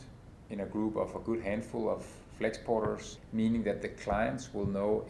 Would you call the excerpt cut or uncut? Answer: cut